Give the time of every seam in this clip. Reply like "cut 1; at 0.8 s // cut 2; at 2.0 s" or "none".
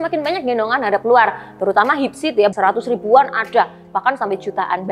cut 1; at 2.5 s